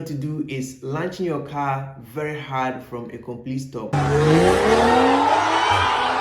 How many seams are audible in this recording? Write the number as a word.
one